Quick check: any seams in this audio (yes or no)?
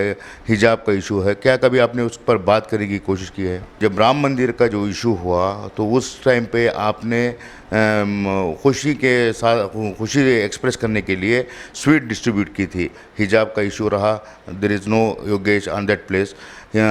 yes